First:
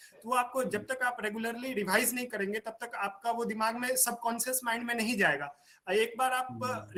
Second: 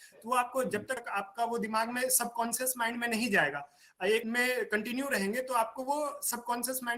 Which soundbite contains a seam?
second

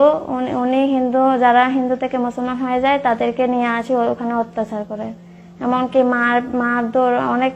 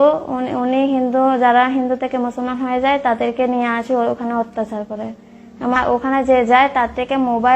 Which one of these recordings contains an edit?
second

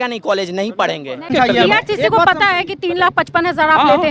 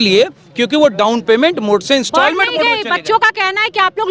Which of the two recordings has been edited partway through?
first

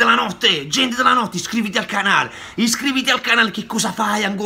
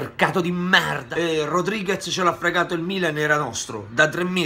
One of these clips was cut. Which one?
second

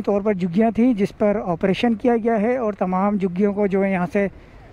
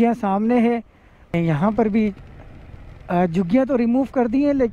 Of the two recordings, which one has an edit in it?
second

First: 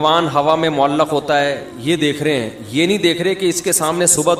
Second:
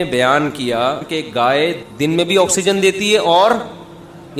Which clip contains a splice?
second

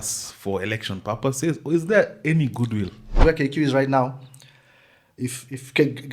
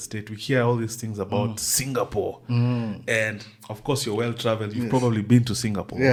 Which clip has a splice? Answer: first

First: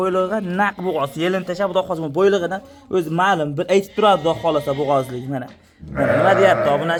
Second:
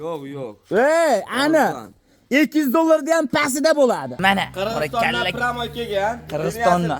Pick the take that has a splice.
second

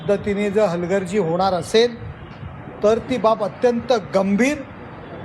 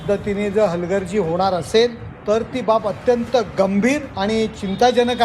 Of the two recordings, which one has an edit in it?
second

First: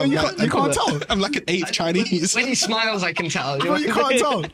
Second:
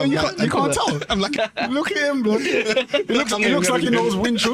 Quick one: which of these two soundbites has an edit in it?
second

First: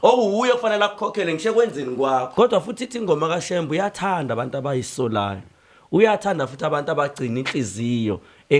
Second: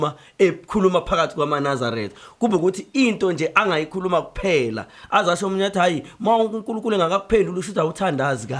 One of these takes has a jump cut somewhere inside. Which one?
first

